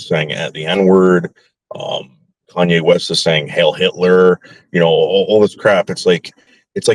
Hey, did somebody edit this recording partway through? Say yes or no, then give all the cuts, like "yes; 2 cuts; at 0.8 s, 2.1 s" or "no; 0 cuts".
no; 0 cuts